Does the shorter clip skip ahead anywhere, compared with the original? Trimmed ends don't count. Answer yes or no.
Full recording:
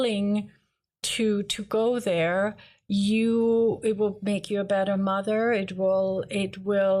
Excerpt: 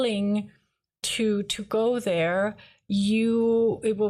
no